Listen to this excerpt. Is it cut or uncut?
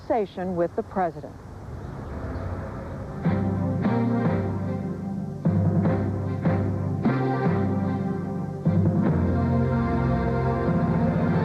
cut